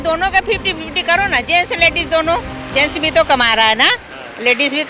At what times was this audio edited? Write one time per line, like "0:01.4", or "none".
none